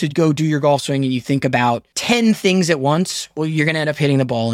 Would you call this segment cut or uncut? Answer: cut